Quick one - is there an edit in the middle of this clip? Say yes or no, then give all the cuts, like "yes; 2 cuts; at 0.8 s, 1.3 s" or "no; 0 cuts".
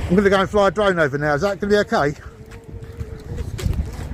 no; 0 cuts